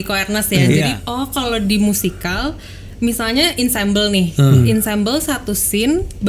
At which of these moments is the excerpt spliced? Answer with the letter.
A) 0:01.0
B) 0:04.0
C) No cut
A